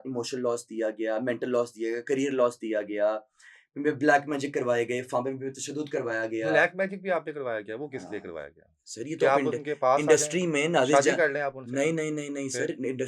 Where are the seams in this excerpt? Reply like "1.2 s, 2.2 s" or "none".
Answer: none

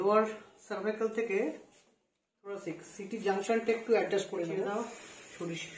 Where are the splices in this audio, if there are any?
4.5 s

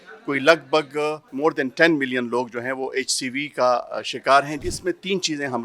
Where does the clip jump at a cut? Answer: 1.2 s, 4.7 s

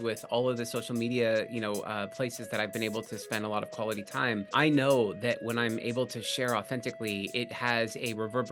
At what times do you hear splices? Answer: 4.5 s

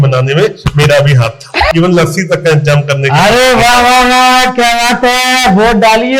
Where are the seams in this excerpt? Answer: 1.7 s

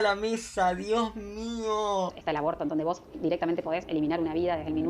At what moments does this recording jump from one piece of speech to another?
2.2 s

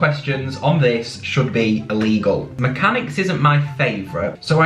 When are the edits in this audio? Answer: 2.5 s

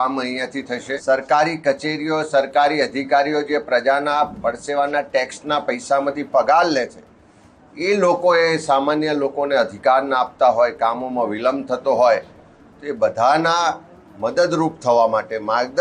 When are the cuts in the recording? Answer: 0.9 s

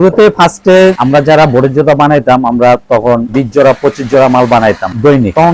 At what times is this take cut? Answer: none

